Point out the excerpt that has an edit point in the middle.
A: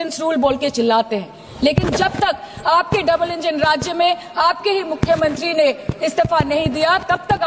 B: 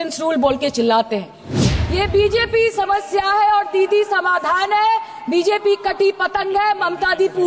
B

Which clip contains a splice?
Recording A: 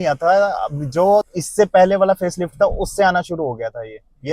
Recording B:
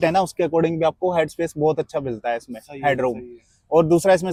A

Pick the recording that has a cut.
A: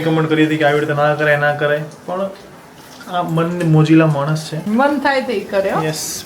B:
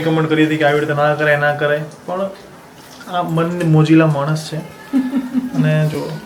A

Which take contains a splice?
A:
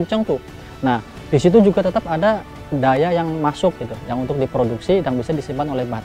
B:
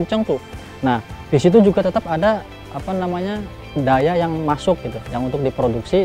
A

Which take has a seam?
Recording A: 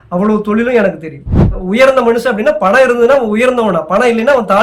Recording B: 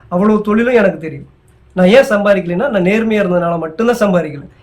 A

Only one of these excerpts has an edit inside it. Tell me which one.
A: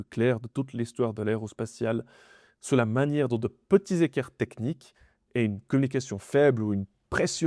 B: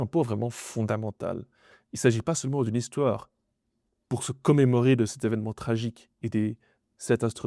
B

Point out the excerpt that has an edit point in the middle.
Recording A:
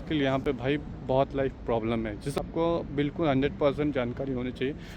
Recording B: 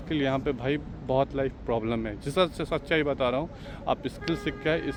A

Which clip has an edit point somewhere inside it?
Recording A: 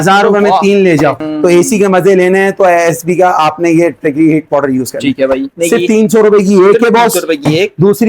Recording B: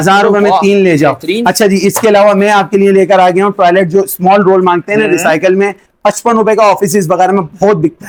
A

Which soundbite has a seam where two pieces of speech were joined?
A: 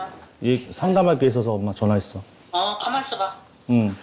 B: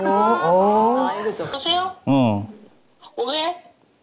B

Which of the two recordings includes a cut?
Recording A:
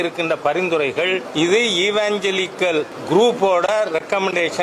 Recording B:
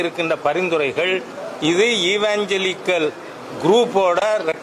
A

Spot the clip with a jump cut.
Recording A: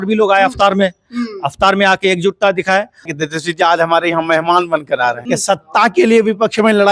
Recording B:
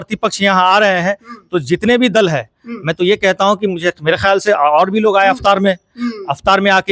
A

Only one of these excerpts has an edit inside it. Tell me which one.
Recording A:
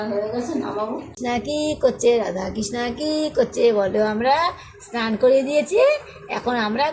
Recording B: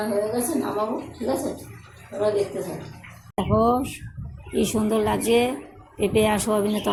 A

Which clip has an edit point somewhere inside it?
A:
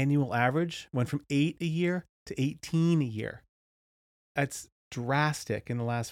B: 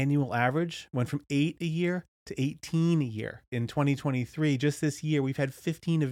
B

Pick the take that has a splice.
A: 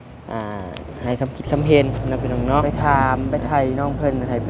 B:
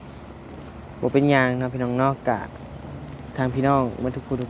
A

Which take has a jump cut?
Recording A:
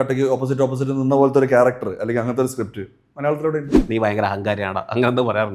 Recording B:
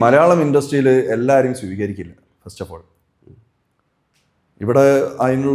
A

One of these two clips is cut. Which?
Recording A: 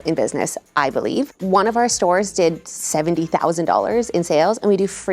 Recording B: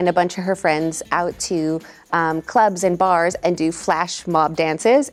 A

